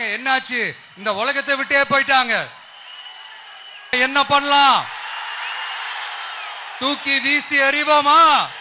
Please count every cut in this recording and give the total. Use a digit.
1